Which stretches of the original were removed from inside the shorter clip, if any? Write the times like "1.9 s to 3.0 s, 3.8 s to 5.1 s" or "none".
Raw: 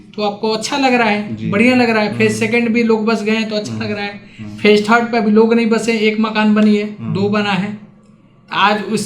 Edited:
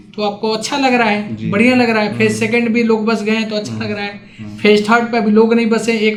none